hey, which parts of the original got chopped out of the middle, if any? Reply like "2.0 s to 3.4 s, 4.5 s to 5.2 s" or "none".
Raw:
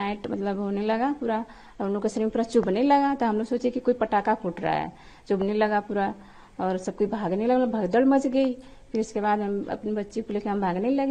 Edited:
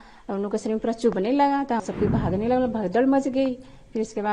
3.3 s to 6.8 s